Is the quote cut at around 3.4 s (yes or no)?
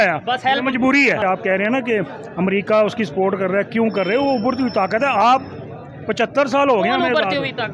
no